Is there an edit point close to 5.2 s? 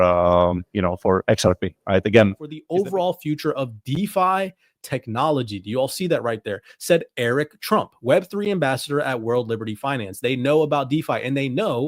no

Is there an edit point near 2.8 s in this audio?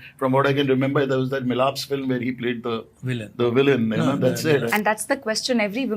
no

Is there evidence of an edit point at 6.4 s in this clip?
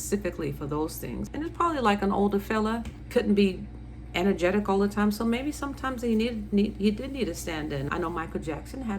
no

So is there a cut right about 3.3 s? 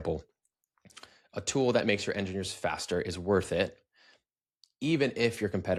no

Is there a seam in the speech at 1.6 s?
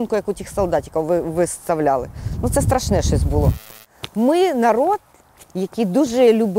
no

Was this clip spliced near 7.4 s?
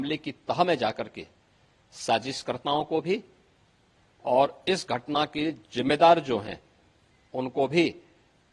no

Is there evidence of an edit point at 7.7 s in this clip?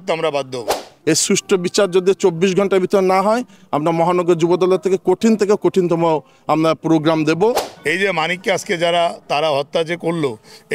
yes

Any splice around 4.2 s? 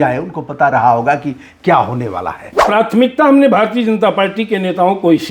no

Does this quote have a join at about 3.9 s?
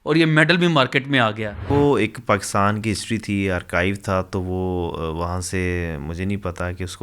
no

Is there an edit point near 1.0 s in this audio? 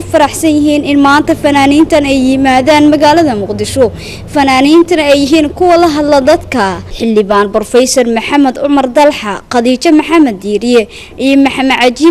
no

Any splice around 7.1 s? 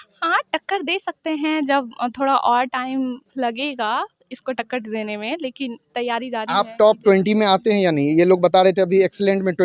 no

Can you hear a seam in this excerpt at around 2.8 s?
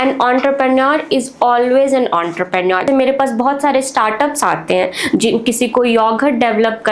yes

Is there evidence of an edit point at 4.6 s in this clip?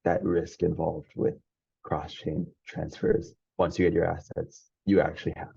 no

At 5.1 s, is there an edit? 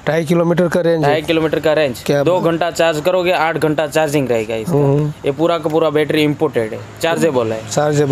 no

